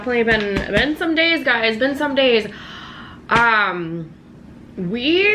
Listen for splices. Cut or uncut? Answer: uncut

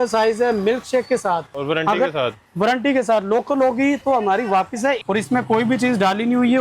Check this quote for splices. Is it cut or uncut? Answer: cut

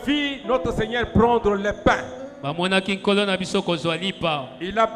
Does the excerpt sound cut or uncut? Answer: uncut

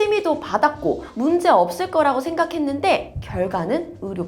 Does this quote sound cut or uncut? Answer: uncut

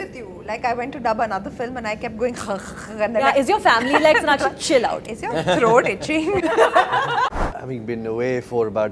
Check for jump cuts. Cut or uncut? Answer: cut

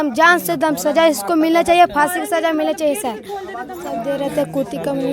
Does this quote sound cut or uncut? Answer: cut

